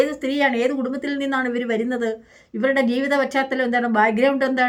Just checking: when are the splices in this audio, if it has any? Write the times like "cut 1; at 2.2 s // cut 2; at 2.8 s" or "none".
none